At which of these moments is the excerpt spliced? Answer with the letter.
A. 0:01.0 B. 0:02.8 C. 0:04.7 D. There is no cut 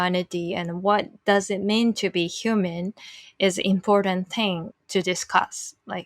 C